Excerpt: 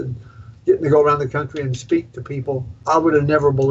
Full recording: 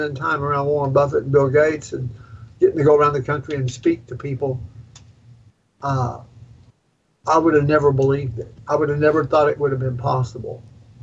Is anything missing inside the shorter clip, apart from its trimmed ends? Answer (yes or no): yes